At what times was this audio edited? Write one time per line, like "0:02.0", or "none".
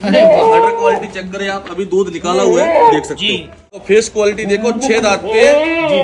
0:03.8